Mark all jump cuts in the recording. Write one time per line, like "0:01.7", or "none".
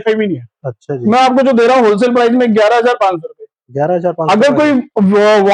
none